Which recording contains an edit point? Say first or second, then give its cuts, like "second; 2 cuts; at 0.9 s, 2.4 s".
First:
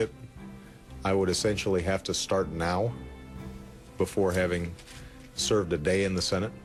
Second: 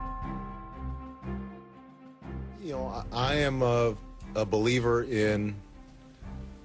second; 1 cut; at 2.7 s